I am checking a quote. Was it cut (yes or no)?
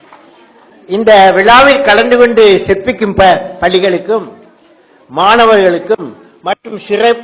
no